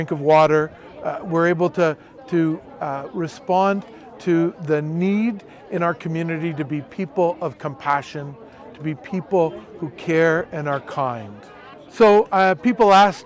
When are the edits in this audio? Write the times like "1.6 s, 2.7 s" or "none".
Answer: 11.8 s